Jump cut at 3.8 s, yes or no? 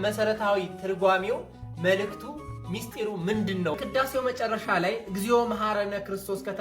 yes